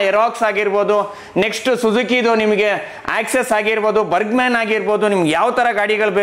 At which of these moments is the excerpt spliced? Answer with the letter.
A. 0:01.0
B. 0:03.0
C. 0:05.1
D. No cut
D